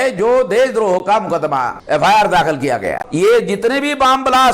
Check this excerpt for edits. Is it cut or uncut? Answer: cut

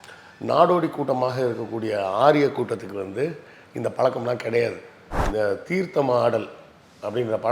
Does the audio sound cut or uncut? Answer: cut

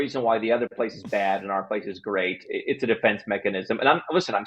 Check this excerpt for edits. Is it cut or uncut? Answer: uncut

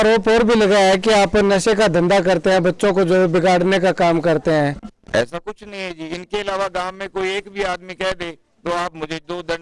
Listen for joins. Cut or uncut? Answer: uncut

